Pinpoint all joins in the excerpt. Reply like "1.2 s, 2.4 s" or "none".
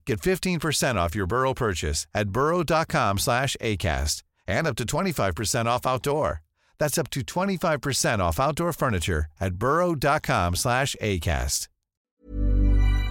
12.1 s